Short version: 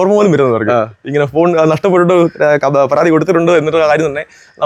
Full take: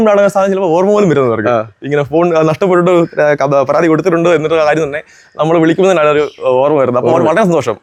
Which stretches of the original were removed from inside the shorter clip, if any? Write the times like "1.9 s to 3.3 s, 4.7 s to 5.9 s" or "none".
none